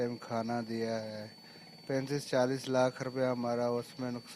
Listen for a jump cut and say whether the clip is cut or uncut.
uncut